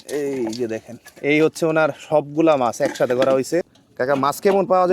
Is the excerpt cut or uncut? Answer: cut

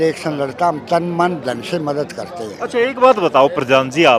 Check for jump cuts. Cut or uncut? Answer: uncut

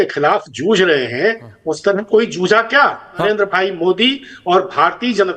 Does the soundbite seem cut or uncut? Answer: cut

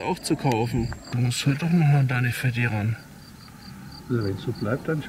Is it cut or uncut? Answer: cut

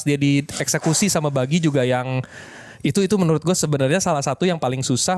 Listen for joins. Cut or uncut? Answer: uncut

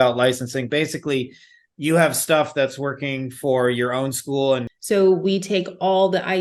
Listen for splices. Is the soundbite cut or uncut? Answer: cut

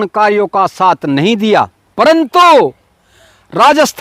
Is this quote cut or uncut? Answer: cut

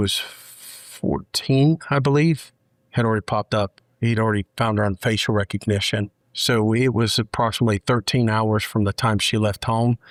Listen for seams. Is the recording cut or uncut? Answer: uncut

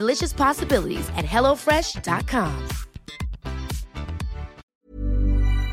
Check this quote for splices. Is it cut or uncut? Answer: cut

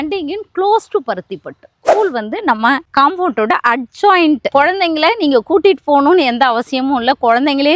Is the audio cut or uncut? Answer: cut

